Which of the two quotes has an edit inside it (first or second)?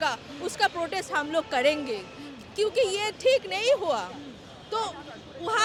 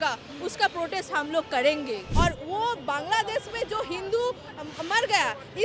second